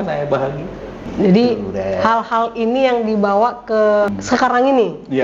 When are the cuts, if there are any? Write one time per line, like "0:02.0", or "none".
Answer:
0:01.0
0:04.2